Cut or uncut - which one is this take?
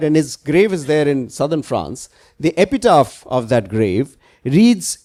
uncut